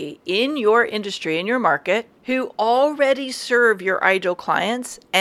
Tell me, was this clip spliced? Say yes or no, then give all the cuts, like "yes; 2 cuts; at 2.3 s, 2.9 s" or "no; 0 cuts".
yes; 1 cut; at 2.1 s